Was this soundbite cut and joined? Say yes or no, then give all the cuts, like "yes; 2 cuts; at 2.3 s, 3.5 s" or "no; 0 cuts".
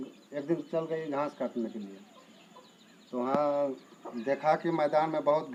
no; 0 cuts